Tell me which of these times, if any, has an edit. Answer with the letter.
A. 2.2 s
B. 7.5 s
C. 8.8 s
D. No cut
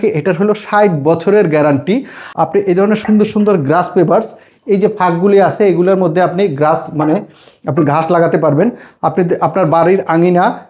A